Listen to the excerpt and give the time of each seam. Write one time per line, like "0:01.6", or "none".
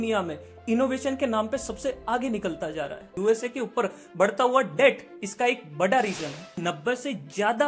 0:03.1
0:06.6